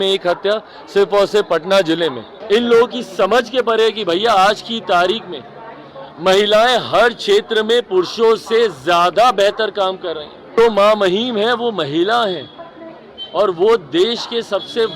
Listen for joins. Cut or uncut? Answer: cut